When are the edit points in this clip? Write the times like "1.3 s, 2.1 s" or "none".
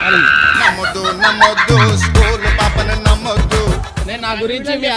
3.9 s